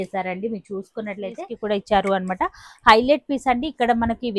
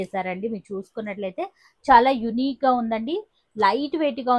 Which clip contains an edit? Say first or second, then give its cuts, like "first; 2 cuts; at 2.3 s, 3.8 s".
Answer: first; 1 cut; at 1.5 s